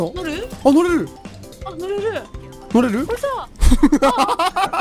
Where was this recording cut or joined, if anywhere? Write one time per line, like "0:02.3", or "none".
none